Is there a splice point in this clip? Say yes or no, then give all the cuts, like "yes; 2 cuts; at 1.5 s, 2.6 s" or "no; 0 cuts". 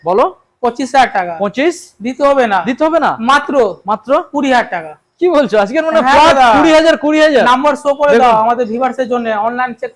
no; 0 cuts